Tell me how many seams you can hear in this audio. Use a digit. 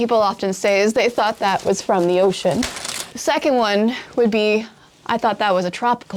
0